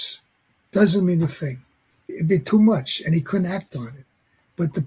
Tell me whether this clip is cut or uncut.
uncut